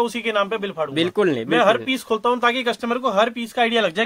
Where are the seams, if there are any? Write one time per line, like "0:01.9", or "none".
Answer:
none